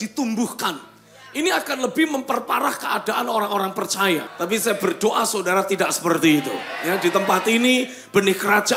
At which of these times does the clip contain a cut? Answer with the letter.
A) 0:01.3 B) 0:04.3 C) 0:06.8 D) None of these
B